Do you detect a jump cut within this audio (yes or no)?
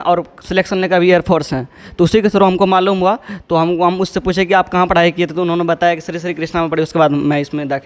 no